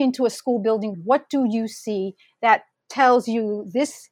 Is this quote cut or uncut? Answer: cut